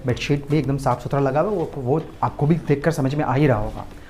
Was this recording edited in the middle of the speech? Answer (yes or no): no